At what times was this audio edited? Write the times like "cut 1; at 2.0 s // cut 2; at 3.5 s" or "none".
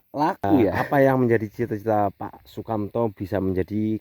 cut 1; at 1.0 s